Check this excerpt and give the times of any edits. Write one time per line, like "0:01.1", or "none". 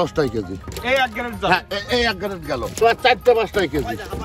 0:02.8